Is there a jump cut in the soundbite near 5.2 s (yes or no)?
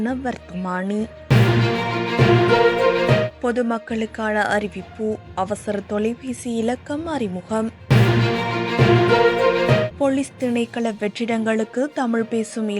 no